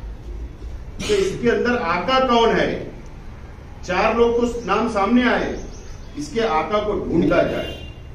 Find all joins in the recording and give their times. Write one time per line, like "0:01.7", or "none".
0:07.2